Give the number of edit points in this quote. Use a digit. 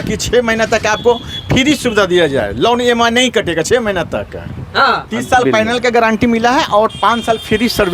1